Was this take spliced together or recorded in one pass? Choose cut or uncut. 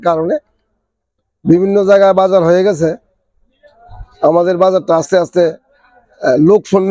uncut